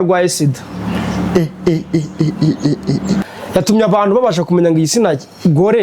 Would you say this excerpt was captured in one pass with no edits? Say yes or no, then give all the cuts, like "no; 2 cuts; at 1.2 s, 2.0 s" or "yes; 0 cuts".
no; 1 cut; at 3.2 s